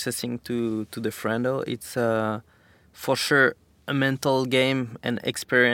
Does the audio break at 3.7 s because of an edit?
yes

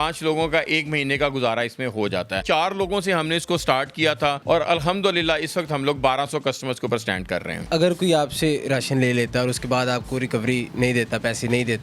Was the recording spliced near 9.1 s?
no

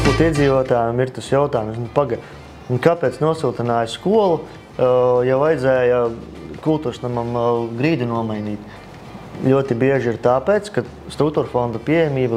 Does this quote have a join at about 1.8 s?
no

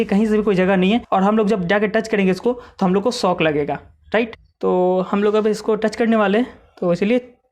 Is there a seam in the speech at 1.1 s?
yes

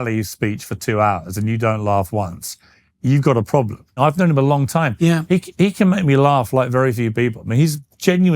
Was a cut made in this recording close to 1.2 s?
no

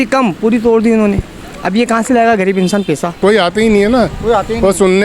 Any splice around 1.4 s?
no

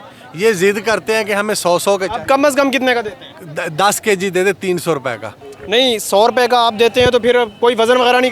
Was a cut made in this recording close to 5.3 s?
yes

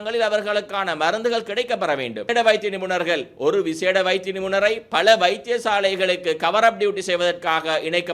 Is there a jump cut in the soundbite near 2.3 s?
yes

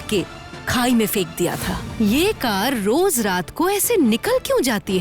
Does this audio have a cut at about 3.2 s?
no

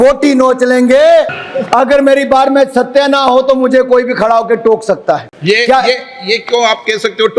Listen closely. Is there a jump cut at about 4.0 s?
no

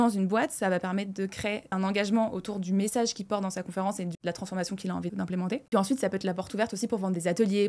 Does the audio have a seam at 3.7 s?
no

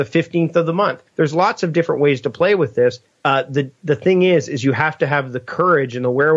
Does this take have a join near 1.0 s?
yes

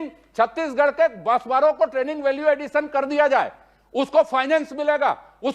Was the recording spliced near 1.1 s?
no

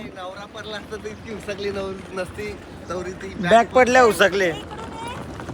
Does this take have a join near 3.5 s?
no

